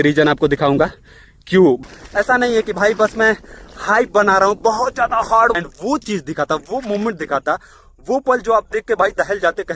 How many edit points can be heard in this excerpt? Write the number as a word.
two